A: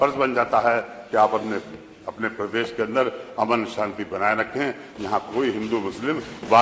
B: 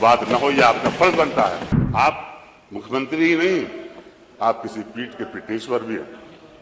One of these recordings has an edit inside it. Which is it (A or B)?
B